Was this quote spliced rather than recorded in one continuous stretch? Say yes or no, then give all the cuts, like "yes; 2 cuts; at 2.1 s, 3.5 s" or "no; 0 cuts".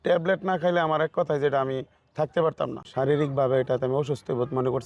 yes; 1 cut; at 2.9 s